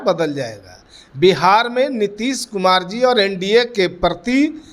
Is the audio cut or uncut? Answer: uncut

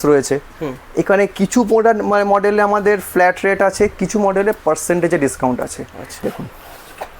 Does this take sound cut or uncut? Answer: cut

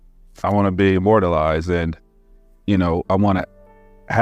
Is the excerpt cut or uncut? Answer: uncut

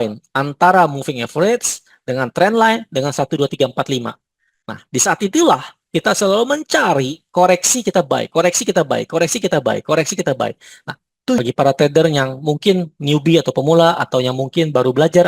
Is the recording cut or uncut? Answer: cut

